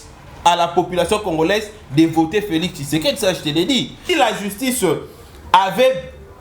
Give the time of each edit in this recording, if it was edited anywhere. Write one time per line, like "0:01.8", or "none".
0:04.0